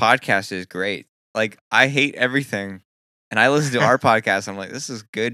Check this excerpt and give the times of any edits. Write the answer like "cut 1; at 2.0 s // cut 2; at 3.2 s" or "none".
cut 1; at 1.2 s